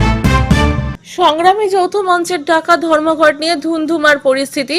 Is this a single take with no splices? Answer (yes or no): yes